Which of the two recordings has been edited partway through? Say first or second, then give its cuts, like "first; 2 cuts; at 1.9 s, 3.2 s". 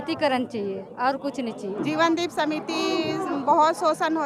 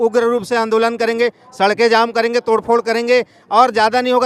first; 1 cut; at 1.8 s